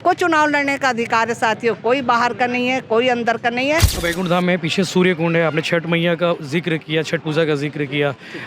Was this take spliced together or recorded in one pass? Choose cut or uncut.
cut